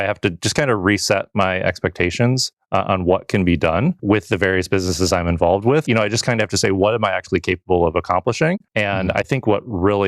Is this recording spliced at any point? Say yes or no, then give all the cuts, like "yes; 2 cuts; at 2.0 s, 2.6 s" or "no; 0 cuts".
yes; 3 cuts; at 4.0 s, 5.8 s, 8.7 s